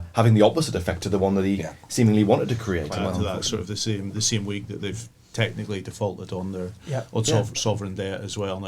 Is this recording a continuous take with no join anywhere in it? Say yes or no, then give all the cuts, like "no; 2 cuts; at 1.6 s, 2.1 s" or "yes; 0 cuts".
no; 1 cut; at 3.0 s